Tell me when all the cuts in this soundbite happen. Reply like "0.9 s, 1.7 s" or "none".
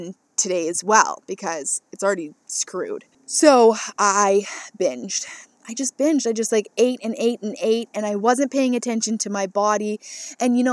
3.2 s